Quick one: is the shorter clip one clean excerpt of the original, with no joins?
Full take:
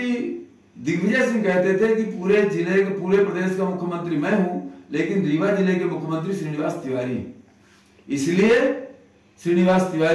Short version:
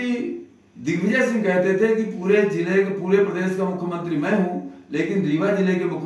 yes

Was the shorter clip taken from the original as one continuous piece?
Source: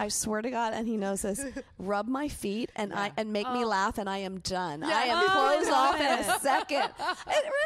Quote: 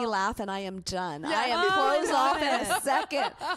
yes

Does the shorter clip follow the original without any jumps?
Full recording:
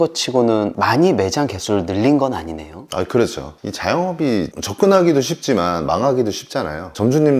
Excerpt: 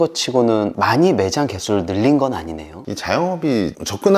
no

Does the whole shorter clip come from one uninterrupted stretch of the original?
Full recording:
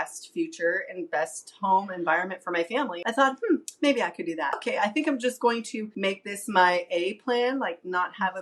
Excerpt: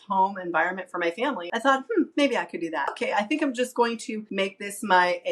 no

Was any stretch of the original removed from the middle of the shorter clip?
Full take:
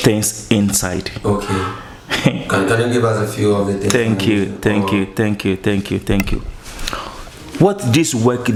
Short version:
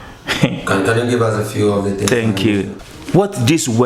yes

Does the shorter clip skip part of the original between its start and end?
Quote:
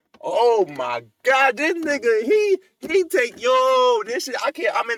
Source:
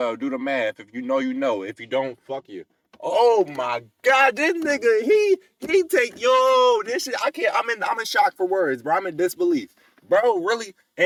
no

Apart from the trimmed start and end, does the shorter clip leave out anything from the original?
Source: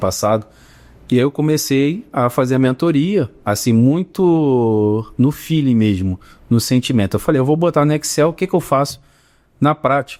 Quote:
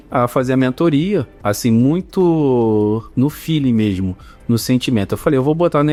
no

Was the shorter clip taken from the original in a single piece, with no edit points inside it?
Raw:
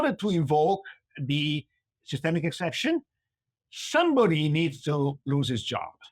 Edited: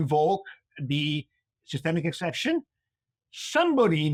yes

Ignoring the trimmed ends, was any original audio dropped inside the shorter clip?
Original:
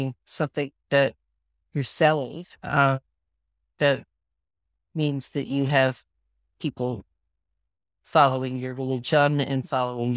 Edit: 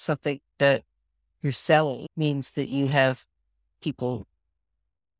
yes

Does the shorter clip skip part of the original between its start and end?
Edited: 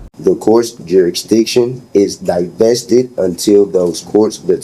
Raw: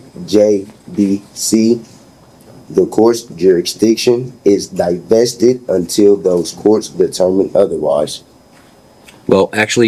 no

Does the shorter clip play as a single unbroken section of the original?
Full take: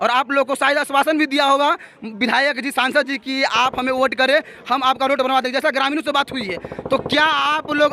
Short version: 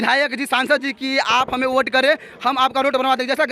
yes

